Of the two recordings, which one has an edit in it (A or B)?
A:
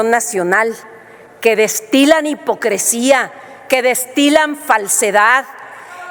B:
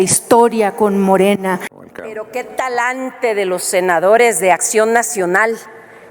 B